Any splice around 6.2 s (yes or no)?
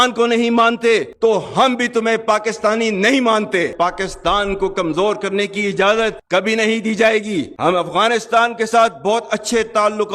no